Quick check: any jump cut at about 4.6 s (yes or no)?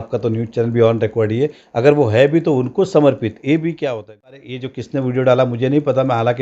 yes